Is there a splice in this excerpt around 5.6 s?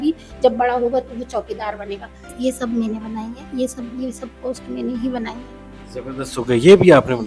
no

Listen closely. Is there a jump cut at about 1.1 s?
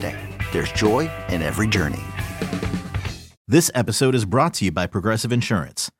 no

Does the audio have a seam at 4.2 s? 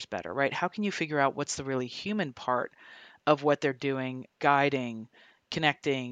yes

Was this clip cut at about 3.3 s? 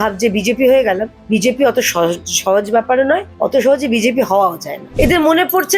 yes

